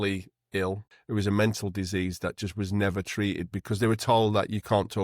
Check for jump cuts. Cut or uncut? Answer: cut